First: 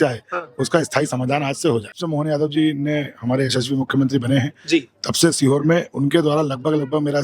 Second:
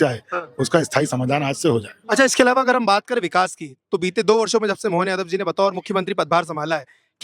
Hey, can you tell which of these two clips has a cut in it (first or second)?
first